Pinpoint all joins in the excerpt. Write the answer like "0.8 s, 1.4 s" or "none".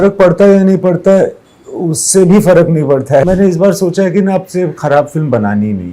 3.2 s

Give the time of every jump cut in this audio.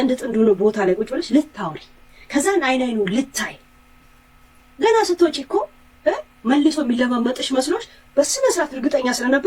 none

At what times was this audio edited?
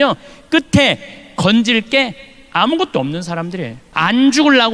3.8 s

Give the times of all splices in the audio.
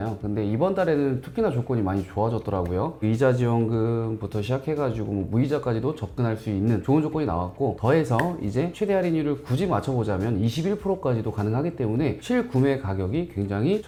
none

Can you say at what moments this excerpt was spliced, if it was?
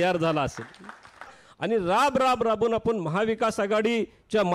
1.4 s

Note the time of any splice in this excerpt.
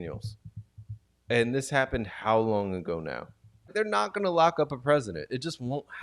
3.7 s

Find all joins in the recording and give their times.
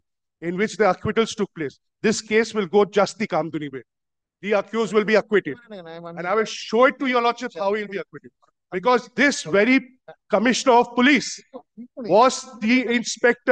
none

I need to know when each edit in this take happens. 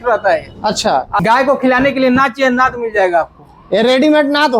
1.2 s

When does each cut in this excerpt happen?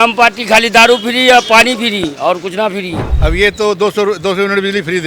3.0 s

